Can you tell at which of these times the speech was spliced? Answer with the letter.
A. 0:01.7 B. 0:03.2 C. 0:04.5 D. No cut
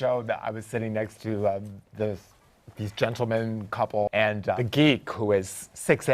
C